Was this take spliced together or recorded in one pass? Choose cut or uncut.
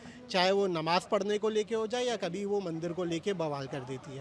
uncut